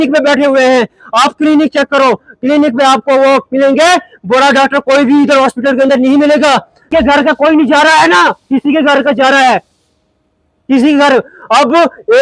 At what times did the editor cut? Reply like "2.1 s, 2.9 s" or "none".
6.9 s